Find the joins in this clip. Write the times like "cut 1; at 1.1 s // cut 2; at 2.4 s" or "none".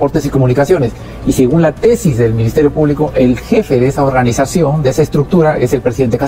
none